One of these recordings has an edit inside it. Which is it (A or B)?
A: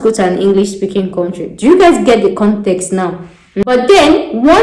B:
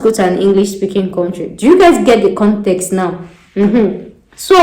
A